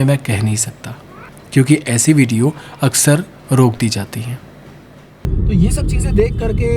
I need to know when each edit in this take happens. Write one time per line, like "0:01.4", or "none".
0:05.2